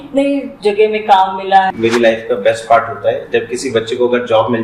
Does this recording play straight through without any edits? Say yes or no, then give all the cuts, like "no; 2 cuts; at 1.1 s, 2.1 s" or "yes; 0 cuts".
no; 1 cut; at 1.7 s